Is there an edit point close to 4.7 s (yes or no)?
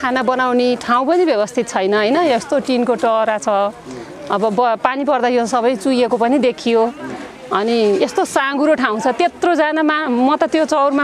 no